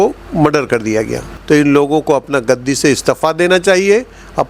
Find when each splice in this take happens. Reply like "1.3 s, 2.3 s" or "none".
1.3 s